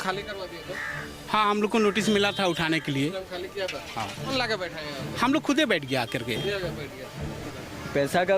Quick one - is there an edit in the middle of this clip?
yes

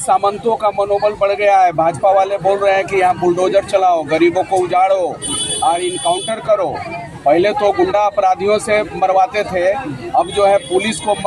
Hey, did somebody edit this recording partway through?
no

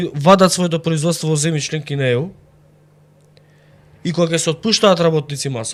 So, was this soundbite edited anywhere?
no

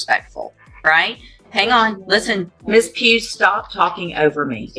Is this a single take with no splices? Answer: no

